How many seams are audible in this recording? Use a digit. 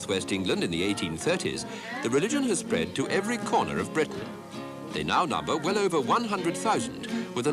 1